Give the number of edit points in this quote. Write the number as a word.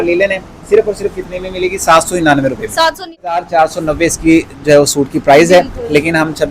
one